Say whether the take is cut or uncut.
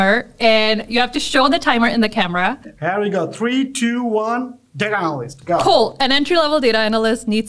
cut